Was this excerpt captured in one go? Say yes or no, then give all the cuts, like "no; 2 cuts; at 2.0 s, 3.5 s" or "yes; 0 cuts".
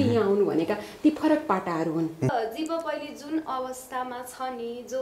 no; 1 cut; at 2.3 s